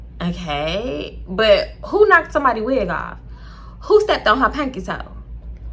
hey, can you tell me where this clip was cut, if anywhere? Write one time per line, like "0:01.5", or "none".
none